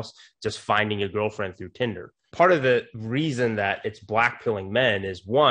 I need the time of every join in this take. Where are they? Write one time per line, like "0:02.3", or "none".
0:02.2
0:02.9